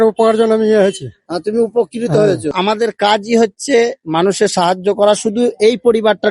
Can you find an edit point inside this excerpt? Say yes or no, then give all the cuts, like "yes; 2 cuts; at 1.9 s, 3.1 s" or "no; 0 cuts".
yes; 1 cut; at 2.5 s